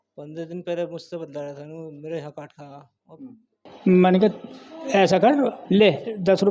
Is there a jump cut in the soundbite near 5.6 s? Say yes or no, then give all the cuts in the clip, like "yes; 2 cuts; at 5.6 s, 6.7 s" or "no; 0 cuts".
yes; 2 cuts; at 3.7 s, 5.6 s